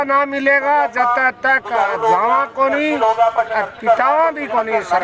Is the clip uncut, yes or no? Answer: yes